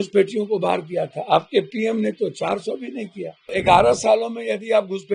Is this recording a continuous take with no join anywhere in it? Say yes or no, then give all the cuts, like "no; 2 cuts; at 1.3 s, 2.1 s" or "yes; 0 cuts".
no; 1 cut; at 3.5 s